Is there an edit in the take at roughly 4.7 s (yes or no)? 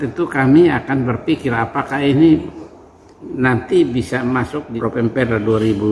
yes